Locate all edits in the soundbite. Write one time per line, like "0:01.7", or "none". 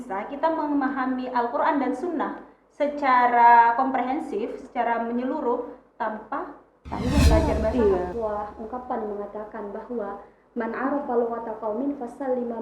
0:08.1